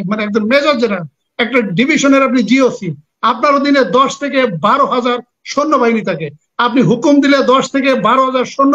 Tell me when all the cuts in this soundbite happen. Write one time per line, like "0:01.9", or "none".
none